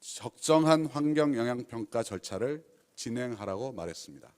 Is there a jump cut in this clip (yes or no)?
no